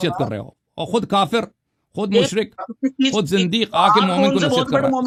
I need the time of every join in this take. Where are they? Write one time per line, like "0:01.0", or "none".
none